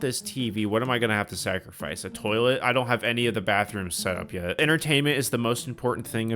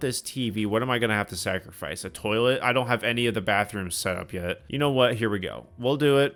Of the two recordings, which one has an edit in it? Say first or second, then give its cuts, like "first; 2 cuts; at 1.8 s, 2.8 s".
first; 1 cut; at 4.5 s